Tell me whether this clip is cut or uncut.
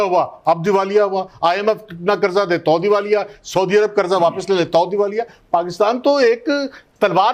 uncut